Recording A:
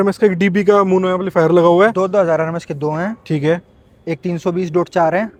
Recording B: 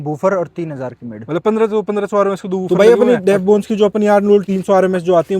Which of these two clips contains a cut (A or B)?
B